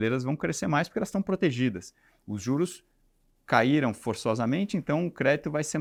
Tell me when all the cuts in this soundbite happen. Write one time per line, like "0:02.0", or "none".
none